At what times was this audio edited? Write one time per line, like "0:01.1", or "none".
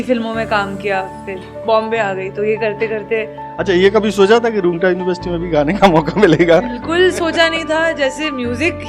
0:03.4